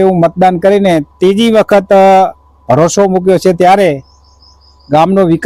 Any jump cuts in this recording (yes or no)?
no